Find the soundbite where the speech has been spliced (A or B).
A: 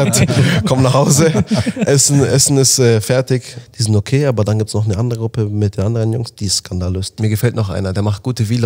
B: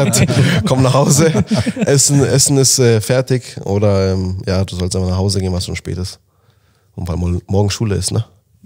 A